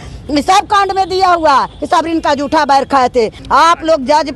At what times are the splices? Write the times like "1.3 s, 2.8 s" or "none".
3.4 s